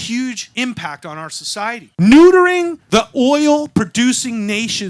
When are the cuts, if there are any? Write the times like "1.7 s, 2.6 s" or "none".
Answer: 1.9 s